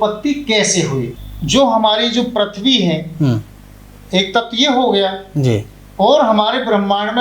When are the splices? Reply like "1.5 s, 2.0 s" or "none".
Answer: 1.2 s